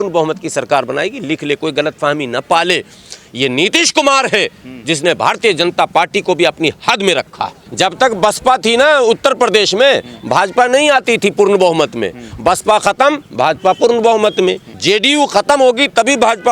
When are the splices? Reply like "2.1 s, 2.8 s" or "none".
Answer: 7.6 s, 14.7 s